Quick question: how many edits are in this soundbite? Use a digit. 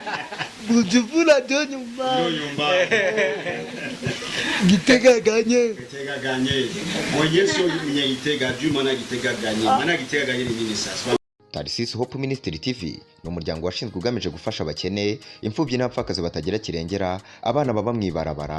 1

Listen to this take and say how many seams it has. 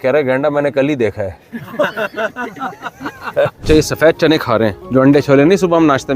2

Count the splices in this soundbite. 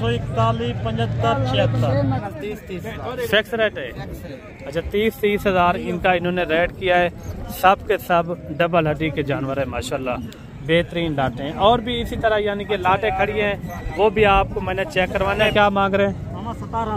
2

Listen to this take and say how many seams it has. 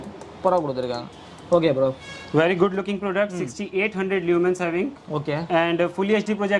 0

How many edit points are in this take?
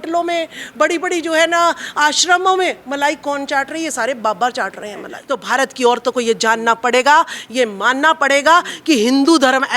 1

